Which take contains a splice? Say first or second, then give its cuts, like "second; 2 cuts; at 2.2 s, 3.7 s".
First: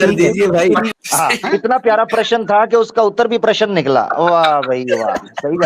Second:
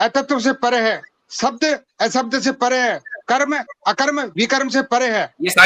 first; 1 cut; at 0.9 s